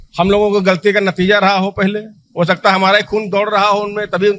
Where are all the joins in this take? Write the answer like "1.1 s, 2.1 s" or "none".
none

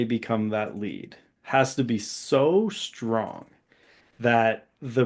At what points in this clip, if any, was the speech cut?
none

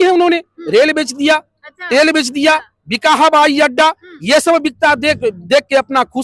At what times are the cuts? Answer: none

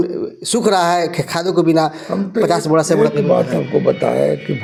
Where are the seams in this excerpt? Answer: none

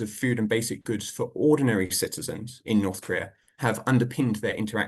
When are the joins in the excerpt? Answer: none

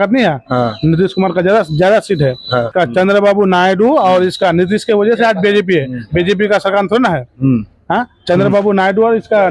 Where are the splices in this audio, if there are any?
2.7 s

